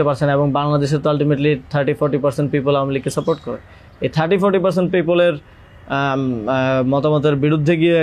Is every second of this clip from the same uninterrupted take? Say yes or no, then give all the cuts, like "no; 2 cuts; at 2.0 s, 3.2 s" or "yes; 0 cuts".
yes; 0 cuts